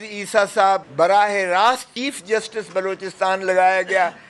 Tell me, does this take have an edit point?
yes; 2 cuts; at 0.9 s, 1.9 s

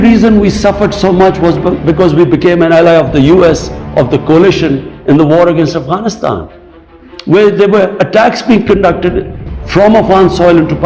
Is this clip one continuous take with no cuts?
yes; 0 cuts

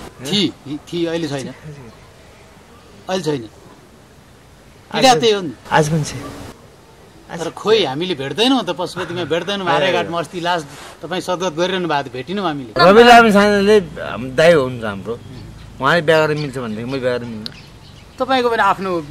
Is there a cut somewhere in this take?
yes; 1 cut; at 12.8 s

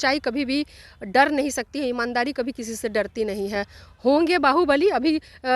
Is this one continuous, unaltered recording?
yes; 0 cuts

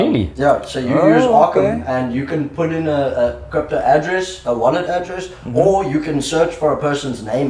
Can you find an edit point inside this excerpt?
no; 0 cuts

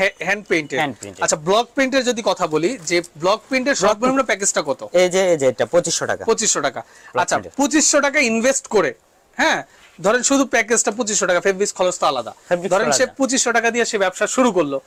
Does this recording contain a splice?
no; 0 cuts

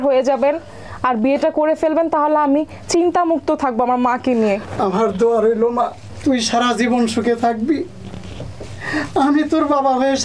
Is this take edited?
no; 0 cuts

